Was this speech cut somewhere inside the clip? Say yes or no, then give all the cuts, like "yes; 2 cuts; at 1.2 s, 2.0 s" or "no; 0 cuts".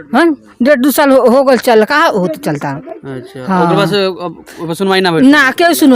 no; 0 cuts